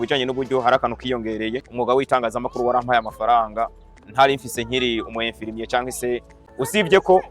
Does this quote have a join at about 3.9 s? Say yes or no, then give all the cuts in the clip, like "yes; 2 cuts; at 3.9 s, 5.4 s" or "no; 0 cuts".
no; 2 cuts; at 2.0 s, 6.4 s